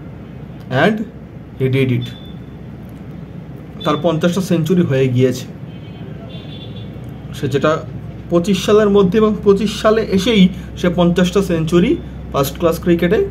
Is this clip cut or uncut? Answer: uncut